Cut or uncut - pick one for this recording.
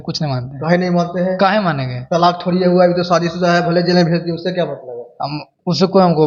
uncut